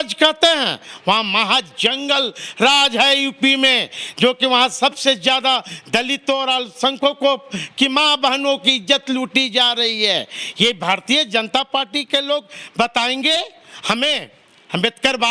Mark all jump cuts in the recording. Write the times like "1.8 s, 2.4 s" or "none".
none